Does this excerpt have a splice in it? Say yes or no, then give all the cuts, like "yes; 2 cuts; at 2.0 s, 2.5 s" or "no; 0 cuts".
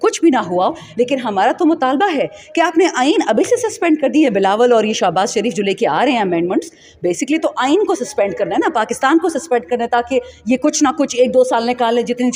no; 0 cuts